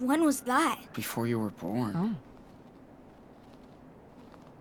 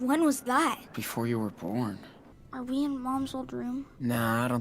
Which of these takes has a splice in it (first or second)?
second